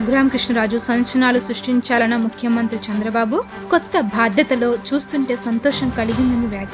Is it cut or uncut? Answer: uncut